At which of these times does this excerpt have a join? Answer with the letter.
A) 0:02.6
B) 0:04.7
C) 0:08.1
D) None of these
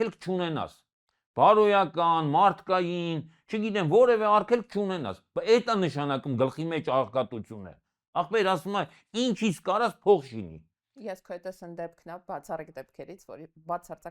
D